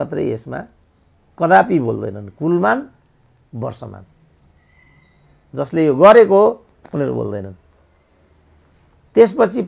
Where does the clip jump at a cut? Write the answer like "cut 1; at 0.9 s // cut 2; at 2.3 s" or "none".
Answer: none